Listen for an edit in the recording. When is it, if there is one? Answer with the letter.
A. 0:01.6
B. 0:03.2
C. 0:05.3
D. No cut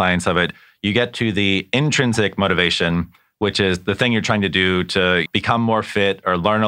C